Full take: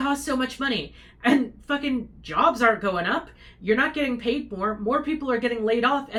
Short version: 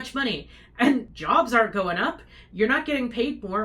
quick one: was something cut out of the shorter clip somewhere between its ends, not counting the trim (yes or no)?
yes